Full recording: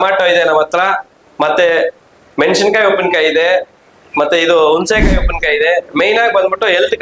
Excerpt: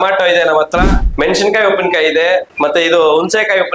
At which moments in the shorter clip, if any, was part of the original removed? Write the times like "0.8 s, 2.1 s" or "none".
1.0 s, 2.5 s